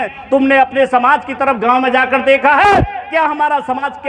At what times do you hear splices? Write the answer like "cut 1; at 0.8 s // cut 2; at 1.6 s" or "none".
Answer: none

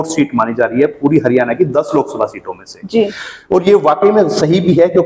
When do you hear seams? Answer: none

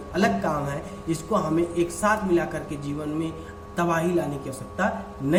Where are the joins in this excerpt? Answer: none

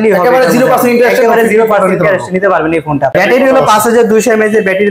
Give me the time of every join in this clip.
cut 1; at 3.1 s

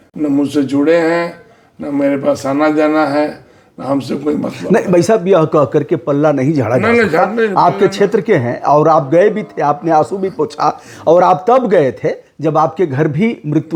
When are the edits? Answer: none

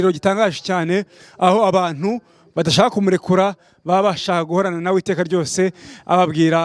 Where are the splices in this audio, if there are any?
none

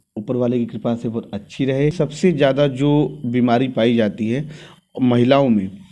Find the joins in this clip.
cut 1; at 1.9 s

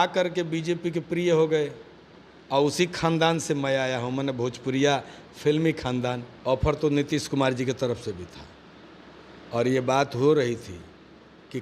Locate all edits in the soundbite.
cut 1; at 6.3 s

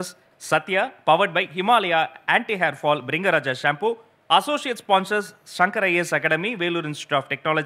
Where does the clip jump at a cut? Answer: none

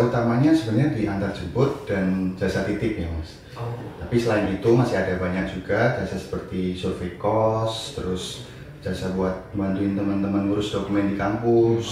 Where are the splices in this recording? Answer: none

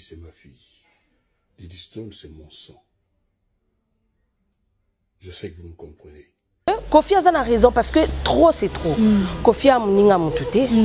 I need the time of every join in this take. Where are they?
cut 1; at 6.7 s

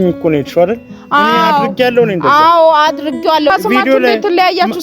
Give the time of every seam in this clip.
cut 1; at 3.5 s

